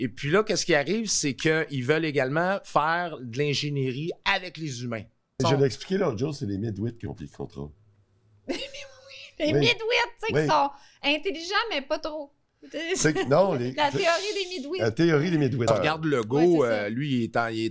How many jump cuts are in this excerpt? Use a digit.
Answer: 2